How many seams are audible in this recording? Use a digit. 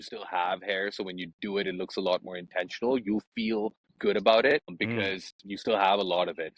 2